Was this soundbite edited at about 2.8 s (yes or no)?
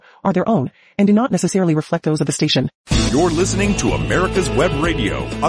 yes